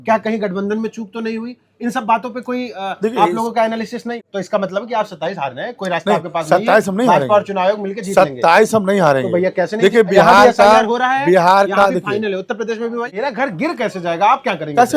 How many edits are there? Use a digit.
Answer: 2